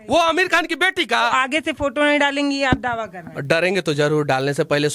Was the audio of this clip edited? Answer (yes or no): yes